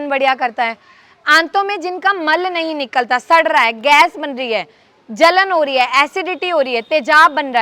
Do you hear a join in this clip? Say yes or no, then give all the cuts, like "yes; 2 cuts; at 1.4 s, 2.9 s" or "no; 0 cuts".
no; 0 cuts